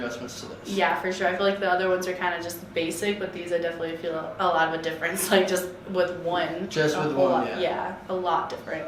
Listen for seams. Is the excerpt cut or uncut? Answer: uncut